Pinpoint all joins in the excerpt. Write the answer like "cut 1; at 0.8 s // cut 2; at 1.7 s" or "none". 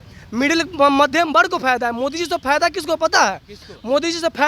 none